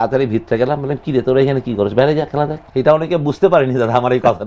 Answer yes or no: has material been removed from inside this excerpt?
yes